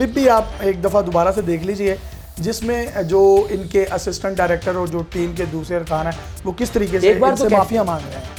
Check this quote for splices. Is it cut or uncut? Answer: uncut